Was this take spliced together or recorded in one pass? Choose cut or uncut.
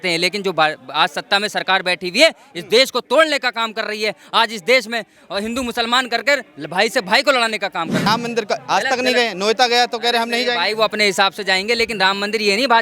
cut